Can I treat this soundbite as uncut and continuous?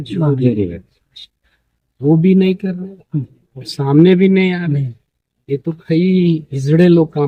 yes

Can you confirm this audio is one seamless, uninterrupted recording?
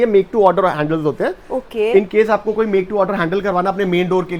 yes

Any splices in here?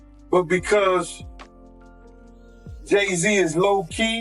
yes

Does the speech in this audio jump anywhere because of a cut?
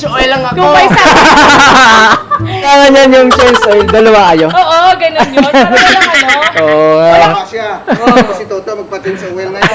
yes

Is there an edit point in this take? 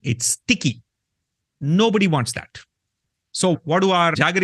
no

